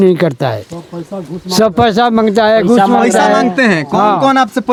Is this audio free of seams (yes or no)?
yes